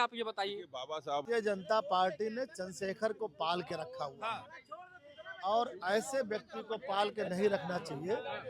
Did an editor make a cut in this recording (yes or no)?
yes